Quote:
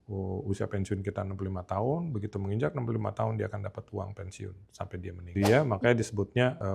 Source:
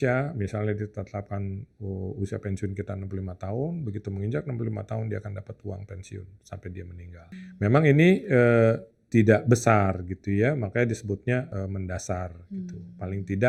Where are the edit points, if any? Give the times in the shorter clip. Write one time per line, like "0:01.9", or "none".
0:05.2